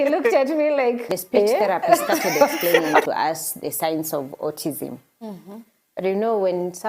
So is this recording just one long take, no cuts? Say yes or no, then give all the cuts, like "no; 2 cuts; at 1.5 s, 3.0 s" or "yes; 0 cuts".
no; 1 cut; at 3.0 s